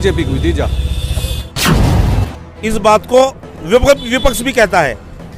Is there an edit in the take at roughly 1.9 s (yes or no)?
yes